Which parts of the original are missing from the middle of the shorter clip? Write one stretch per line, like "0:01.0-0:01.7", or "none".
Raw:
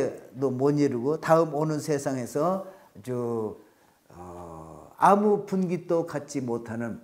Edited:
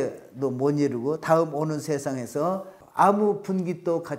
0:02.8-0:04.8